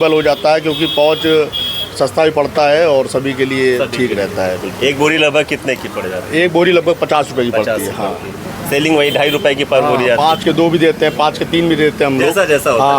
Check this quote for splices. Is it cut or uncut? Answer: uncut